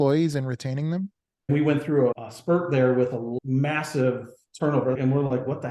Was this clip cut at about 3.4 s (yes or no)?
yes